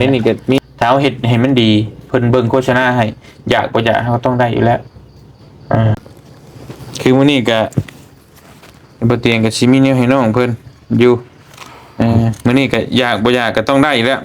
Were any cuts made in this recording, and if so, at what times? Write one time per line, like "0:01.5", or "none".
0:06.0